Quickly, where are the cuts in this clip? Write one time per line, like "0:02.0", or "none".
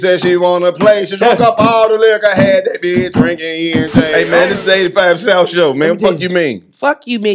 0:04.1